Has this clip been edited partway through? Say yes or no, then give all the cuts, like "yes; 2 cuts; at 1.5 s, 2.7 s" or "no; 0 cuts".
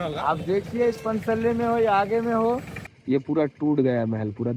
yes; 1 cut; at 2.8 s